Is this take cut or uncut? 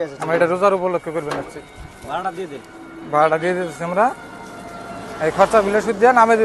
uncut